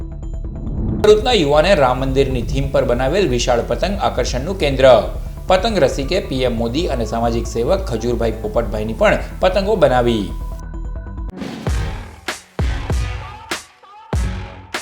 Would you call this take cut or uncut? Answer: cut